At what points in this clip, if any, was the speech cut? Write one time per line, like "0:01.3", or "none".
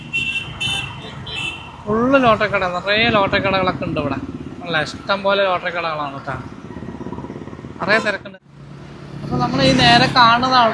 0:08.2